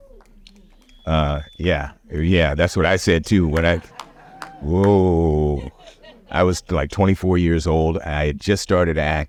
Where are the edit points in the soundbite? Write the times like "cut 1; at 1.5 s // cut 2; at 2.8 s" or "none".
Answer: none

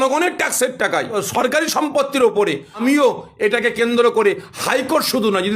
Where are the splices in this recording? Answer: cut 1; at 1.2 s // cut 2; at 2.8 s

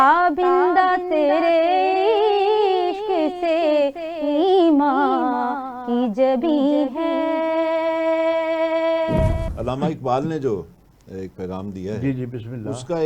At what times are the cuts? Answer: cut 1; at 9.5 s

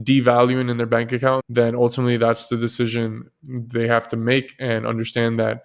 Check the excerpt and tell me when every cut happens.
cut 1; at 1.4 s

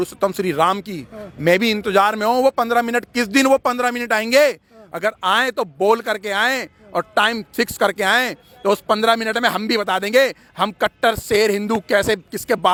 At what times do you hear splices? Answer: none

